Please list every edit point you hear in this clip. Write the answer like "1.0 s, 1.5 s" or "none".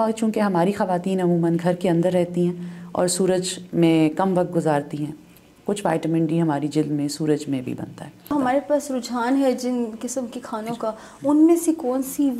8.3 s